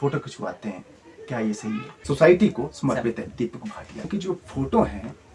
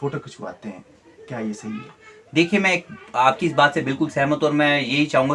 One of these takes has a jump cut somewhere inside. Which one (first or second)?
first